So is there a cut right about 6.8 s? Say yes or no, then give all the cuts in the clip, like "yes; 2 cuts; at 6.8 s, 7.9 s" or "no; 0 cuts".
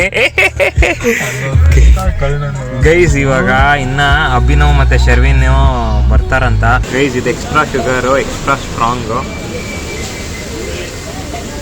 yes; 1 cut; at 6.8 s